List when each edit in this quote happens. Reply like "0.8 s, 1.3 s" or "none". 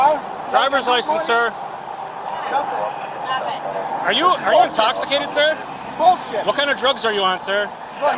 none